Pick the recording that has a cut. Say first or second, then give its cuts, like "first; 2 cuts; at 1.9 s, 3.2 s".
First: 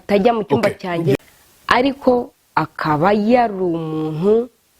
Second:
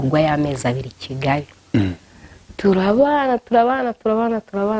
first; 1 cut; at 1.1 s